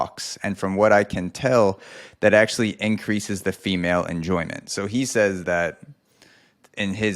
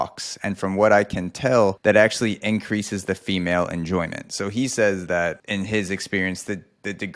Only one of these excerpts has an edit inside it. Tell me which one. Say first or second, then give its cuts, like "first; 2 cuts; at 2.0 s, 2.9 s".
second; 2 cuts; at 1.8 s, 5.4 s